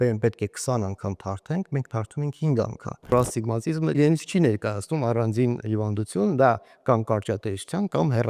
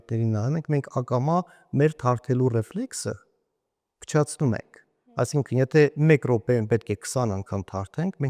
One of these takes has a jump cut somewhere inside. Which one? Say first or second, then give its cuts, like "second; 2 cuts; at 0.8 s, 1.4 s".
first; 1 cut; at 3.1 s